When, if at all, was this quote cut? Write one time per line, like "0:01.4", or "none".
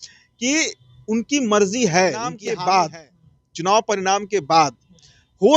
0:02.4

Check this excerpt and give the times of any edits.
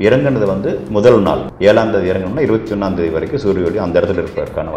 0:01.5

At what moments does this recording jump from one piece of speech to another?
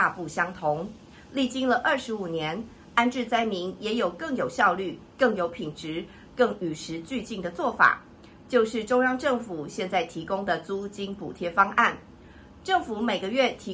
none

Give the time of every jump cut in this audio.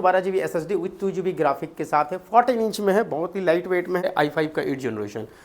0:04.0

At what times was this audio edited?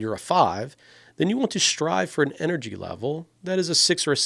none

